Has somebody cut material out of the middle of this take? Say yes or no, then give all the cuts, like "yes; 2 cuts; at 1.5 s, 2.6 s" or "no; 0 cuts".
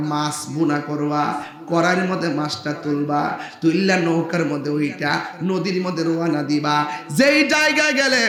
no; 0 cuts